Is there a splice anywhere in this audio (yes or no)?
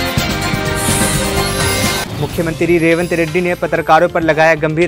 yes